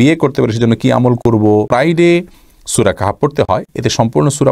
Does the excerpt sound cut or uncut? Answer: cut